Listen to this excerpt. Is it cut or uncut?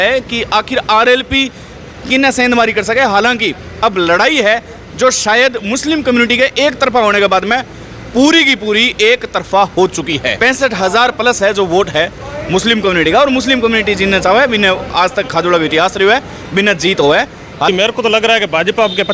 cut